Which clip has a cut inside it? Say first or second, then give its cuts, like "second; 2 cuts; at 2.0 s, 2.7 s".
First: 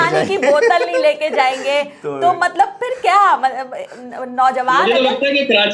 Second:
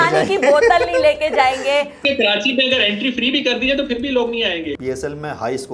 second; 2 cuts; at 2.0 s, 4.7 s